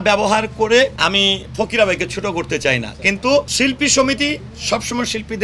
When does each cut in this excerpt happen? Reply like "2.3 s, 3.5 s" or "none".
0.9 s, 3.5 s